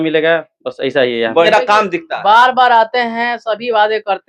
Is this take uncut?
no; 1 cut; at 1.5 s

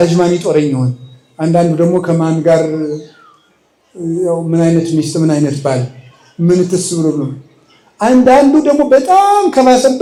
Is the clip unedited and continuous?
yes; 0 cuts

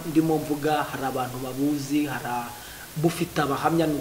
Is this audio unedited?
yes; 0 cuts

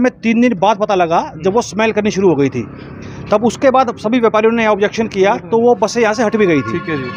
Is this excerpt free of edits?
yes; 0 cuts

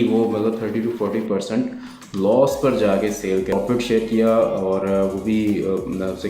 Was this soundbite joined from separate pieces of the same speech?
yes; 1 cut; at 3.5 s

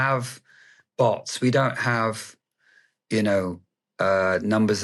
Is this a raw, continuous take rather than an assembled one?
yes; 0 cuts

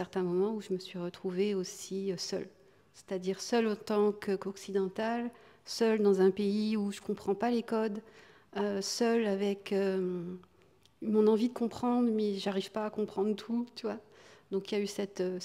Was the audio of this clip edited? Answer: no; 0 cuts

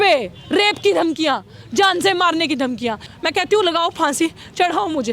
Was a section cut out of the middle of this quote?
yes; 1 cut; at 3.0 s

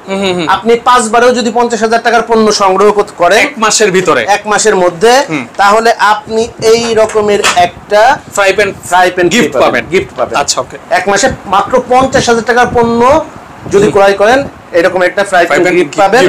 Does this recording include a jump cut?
no; 0 cuts

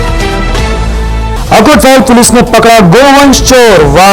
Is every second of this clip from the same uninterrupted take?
no; 1 cut; at 1.3 s

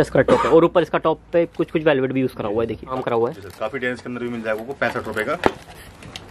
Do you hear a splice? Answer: yes; 1 cut; at 3.0 s

